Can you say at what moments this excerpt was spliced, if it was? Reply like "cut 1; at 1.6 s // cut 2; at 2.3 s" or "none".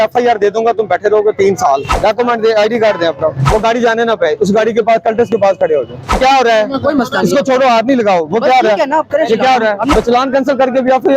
cut 1; at 2.0 s // cut 2; at 3.4 s // cut 3; at 6.2 s // cut 4; at 9.9 s